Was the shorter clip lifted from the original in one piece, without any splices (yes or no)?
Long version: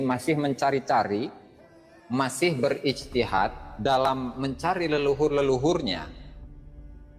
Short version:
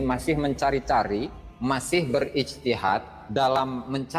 no